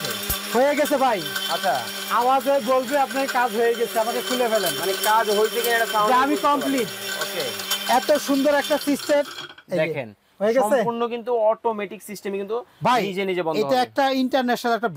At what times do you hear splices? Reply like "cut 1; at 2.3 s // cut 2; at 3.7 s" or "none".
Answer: none